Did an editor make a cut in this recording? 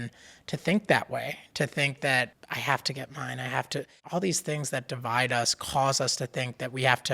yes; 2 cuts; at 2.5 s, 4.0 s

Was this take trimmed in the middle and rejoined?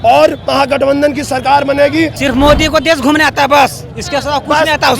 yes; 1 cut; at 2.1 s

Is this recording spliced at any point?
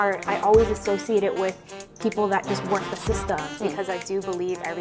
yes; 1 cut; at 3.5 s

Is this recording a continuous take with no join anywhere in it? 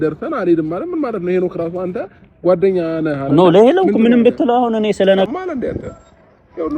no; 1 cut; at 5.3 s

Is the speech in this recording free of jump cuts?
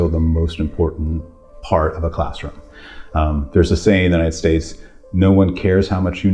yes; 0 cuts

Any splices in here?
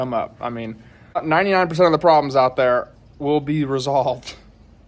yes; 1 cut; at 1.2 s

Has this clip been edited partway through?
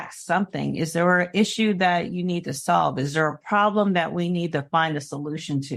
no; 0 cuts

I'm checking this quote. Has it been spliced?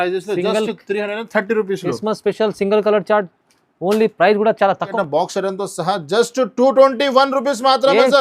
yes; 1 cut; at 4.9 s

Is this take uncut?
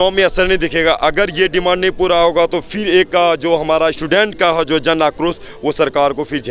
yes; 0 cuts

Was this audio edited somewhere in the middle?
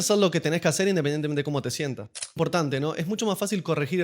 yes; 1 cut; at 2.4 s

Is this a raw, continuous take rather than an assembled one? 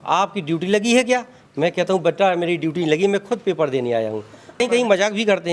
no; 1 cut; at 4.5 s

